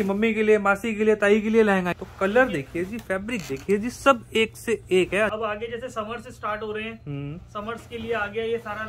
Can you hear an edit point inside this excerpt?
yes; 2 cuts; at 2.0 s, 5.3 s

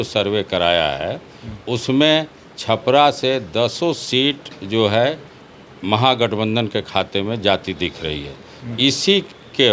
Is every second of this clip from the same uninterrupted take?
yes; 0 cuts

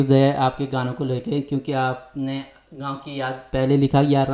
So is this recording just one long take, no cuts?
yes; 0 cuts

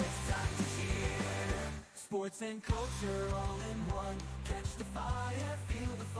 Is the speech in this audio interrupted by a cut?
no; 0 cuts

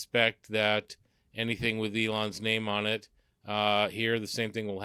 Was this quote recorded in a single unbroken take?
yes; 0 cuts

